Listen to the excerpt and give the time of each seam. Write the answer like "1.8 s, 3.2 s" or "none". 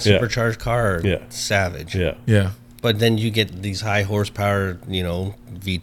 none